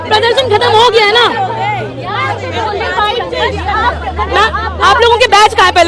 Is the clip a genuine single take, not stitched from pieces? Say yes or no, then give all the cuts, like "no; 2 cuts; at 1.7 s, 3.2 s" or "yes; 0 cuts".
yes; 0 cuts